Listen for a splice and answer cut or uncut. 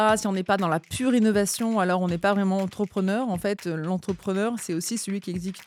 uncut